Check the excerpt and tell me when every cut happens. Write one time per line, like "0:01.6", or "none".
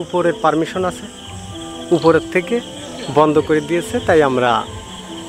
none